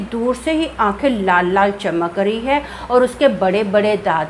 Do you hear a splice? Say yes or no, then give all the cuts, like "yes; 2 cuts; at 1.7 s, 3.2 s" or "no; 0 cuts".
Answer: no; 0 cuts